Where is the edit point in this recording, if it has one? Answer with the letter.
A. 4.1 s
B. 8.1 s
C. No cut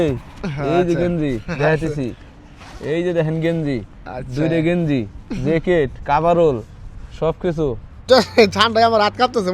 B